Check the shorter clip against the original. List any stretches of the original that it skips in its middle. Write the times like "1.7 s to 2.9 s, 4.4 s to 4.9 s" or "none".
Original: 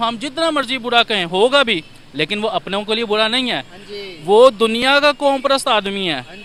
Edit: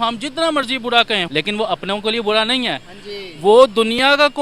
1.2 s to 2.1 s

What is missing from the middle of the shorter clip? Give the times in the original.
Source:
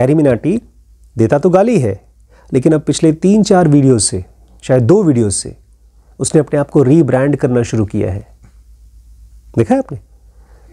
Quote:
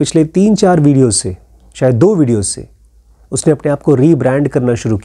none

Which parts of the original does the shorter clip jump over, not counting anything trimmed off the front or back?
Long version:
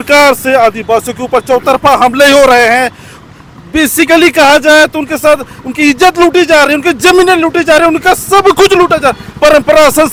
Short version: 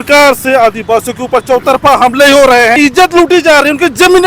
2.8 s to 5.8 s

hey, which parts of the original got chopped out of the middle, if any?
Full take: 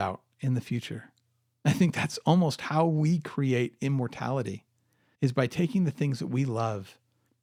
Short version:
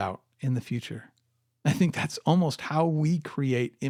none

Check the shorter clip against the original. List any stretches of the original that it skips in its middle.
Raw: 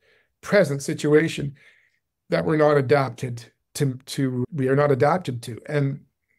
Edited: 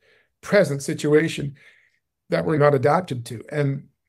2.6 s to 4.8 s

